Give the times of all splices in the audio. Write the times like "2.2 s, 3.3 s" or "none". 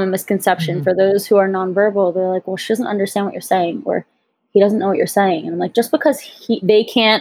none

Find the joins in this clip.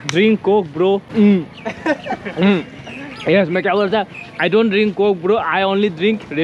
1.1 s, 2.8 s

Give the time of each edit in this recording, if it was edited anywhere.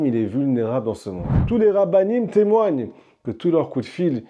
1.3 s

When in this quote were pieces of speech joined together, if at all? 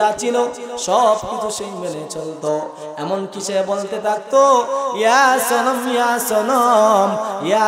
none

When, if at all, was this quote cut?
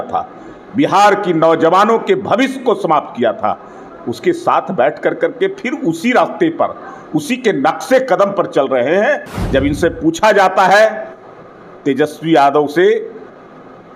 9.3 s

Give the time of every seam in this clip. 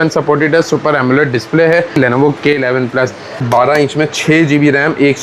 2.0 s, 3.4 s

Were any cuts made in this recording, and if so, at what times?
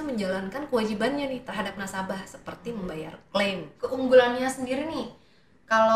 3.7 s

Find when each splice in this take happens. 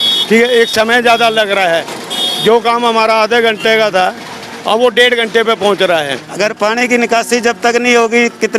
6.2 s

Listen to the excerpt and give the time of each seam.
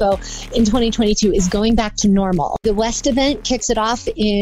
2.6 s

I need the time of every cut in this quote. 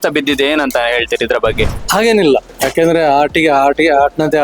1.8 s, 2.6 s

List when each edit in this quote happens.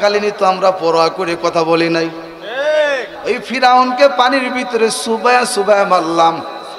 3.1 s

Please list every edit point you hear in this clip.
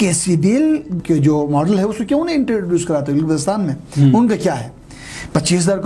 1.0 s

